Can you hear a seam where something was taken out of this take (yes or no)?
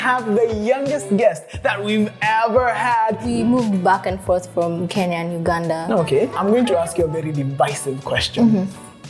yes